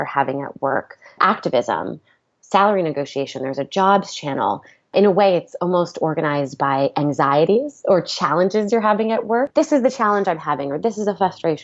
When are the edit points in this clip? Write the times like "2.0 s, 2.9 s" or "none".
1.2 s, 4.7 s, 9.5 s